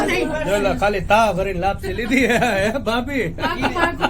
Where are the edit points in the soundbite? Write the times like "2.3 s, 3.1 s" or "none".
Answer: 2.5 s